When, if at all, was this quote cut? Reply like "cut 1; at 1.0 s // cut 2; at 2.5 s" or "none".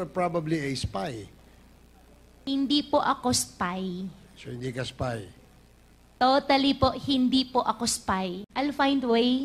cut 1; at 8.4 s